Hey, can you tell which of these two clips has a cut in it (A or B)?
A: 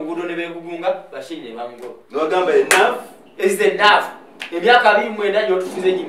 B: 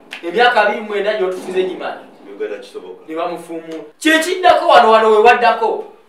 B